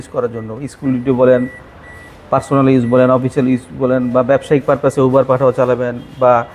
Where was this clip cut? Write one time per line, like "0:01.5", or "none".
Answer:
none